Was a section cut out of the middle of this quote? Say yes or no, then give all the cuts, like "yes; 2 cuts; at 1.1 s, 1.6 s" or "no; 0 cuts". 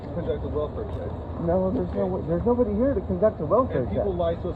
no; 0 cuts